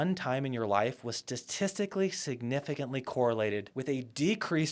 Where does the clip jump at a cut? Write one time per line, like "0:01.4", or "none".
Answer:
0:03.7